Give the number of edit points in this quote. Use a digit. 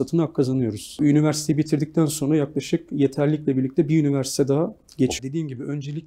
2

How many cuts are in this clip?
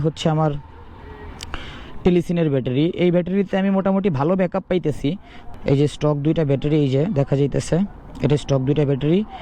1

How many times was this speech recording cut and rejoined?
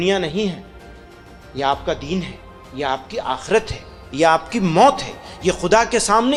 0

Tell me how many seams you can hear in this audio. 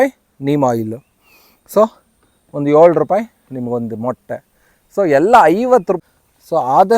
1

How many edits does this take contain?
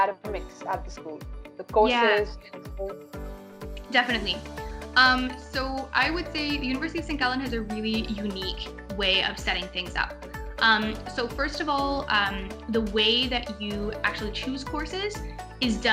0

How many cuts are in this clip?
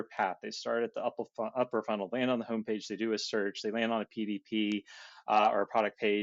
0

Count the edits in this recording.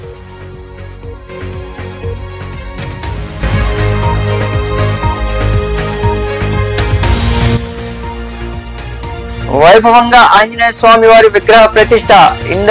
1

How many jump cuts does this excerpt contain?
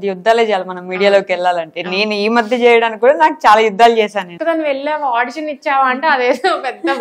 1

